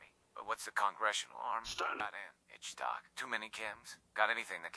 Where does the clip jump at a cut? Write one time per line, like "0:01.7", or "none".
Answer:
0:02.0